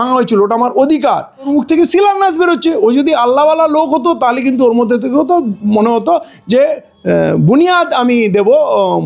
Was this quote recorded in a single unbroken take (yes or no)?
no